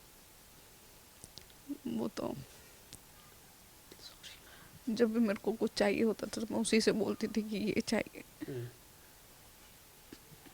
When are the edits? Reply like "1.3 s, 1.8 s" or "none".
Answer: 4.5 s